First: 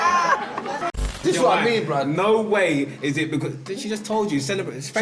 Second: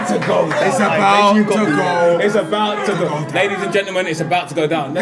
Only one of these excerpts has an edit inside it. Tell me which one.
first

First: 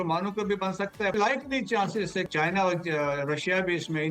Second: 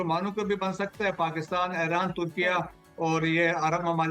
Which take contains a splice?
first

